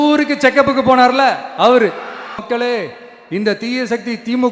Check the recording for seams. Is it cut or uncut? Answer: cut